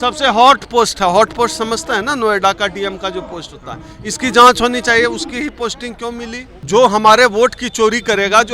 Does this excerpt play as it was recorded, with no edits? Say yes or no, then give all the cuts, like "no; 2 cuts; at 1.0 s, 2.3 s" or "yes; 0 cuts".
no; 1 cut; at 6.6 s